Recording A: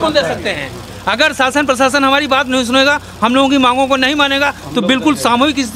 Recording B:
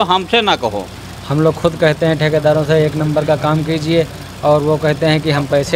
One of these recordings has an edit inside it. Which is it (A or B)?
B